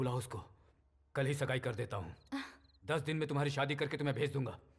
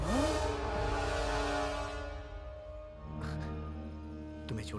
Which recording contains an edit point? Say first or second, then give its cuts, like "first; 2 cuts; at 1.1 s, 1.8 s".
second; 1 cut; at 3.0 s